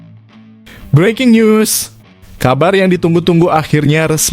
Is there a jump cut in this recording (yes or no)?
yes